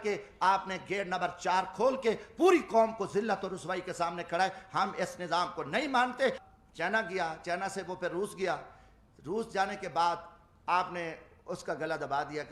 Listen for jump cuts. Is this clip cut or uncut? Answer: cut